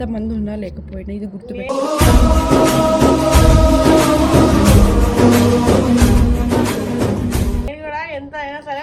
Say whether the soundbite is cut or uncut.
uncut